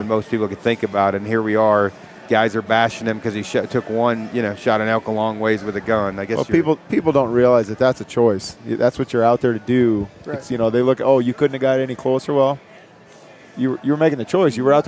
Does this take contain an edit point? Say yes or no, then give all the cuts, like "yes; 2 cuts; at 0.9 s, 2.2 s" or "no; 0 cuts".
no; 0 cuts